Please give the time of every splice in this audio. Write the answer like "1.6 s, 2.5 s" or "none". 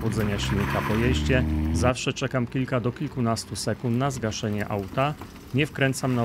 none